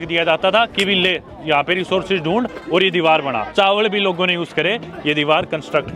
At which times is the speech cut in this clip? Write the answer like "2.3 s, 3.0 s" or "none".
3.5 s